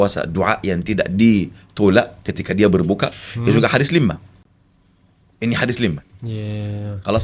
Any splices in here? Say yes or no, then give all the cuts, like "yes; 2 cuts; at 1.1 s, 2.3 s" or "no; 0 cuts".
no; 0 cuts